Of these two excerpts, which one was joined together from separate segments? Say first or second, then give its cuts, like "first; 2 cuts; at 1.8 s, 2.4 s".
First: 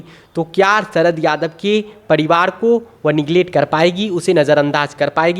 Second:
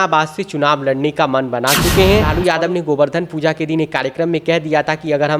second; 1 cut; at 2.3 s